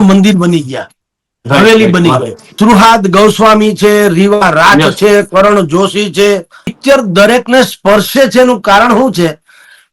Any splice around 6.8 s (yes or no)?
yes